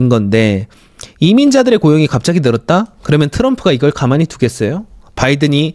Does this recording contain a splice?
no; 0 cuts

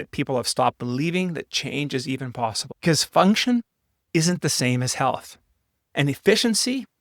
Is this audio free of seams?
no; 1 cut; at 2.7 s

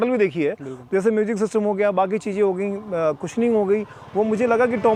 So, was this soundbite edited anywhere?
no; 0 cuts

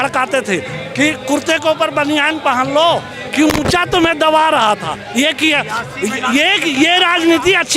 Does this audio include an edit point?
no; 0 cuts

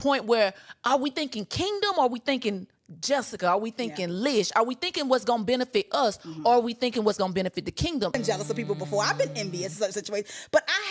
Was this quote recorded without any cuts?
no; 1 cut; at 8.2 s

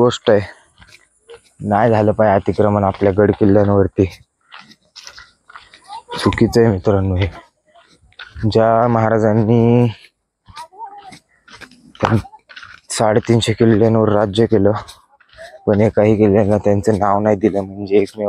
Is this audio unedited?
yes; 0 cuts

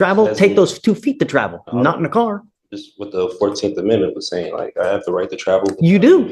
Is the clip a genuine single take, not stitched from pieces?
yes; 0 cuts

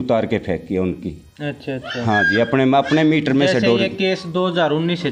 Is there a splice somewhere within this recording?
no; 0 cuts

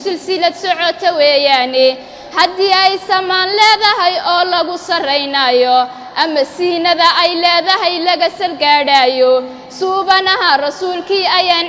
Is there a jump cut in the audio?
no; 0 cuts

